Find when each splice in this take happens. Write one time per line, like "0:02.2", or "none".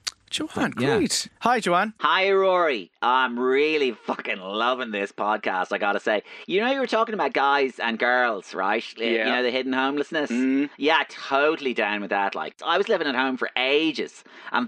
0:01.3